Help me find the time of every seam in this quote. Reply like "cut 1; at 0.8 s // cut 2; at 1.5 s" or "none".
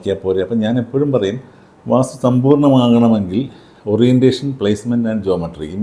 none